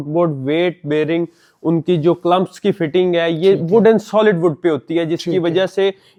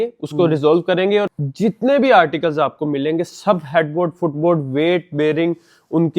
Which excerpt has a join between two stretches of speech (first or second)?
second